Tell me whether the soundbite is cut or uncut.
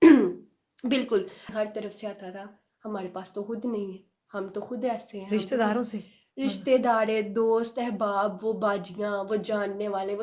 cut